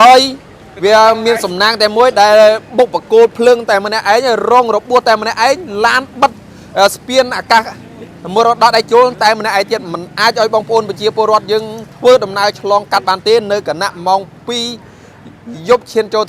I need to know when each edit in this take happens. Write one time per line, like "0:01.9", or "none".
none